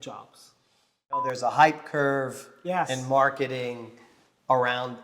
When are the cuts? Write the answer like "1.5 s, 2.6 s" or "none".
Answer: 1.3 s